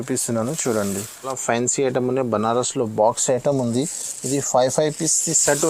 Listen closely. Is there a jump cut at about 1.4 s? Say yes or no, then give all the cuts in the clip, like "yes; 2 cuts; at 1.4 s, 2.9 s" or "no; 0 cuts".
yes; 1 cut; at 1.4 s